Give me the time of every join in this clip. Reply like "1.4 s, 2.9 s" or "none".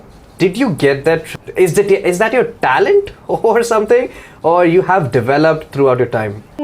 1.3 s